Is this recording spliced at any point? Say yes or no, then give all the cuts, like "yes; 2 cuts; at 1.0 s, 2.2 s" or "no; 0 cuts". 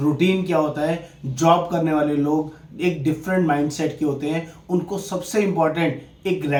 no; 0 cuts